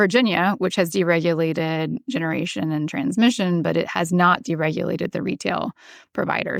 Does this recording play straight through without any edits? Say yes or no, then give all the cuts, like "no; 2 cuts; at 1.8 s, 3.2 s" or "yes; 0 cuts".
yes; 0 cuts